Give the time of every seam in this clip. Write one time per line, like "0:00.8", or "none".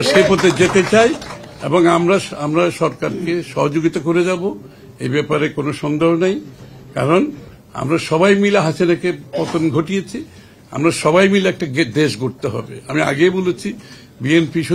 none